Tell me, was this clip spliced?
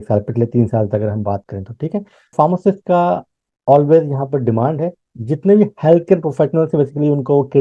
yes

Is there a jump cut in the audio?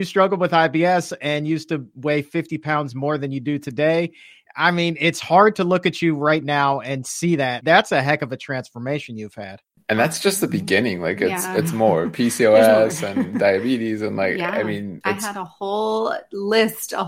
yes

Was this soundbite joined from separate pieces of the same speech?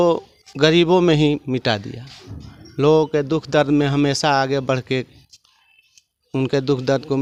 no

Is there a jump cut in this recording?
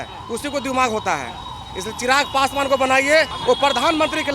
yes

